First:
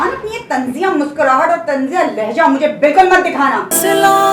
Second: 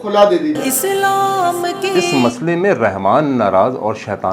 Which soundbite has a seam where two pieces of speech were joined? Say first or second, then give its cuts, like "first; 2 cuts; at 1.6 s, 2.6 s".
second; 1 cut; at 2.0 s